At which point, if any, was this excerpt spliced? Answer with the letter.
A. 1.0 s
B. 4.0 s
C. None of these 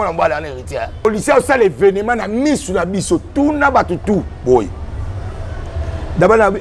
A